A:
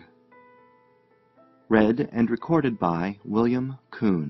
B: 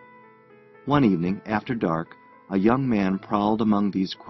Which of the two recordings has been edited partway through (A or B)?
A